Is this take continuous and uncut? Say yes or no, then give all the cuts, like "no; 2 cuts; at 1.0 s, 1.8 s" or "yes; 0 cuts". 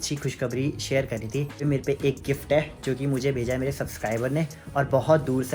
no; 1 cut; at 1.6 s